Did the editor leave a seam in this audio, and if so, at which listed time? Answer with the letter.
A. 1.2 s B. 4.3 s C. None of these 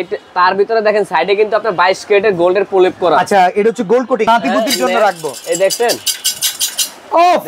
B